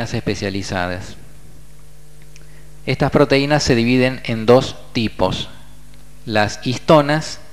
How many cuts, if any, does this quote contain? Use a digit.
1